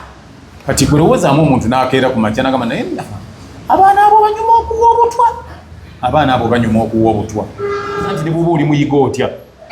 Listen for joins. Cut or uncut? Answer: cut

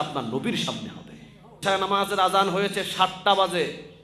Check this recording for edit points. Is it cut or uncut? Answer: cut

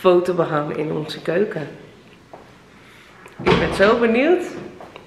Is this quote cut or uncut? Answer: uncut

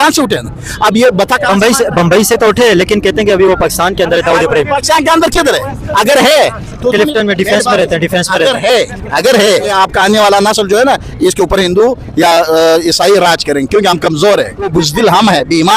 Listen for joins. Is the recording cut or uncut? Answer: cut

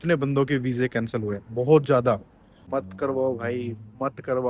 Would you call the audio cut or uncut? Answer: cut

